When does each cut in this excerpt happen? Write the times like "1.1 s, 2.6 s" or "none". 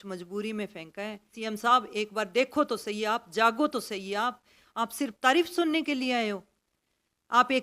1.4 s

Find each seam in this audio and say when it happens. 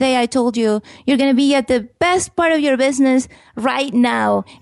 1.9 s

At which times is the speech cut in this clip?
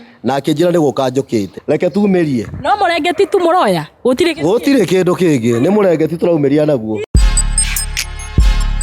1.5 s, 7.0 s

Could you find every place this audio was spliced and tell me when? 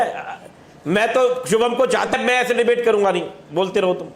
2.1 s

